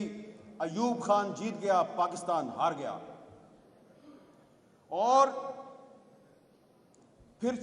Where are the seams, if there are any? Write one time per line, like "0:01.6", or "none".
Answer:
none